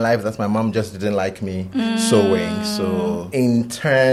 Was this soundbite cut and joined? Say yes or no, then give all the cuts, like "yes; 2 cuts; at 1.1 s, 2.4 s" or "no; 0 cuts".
no; 0 cuts